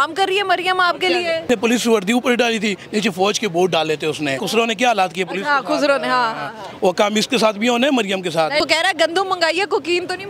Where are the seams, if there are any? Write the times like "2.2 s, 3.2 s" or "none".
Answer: 1.5 s, 4.4 s, 8.6 s